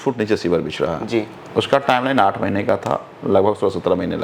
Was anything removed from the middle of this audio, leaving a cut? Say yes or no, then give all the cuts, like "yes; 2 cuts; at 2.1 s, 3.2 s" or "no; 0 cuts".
no; 0 cuts